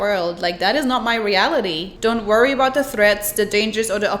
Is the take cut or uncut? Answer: cut